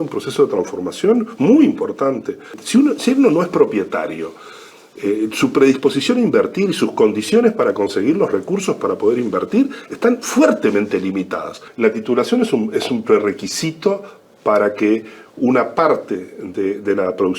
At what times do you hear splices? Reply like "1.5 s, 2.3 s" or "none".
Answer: 2.6 s, 11.6 s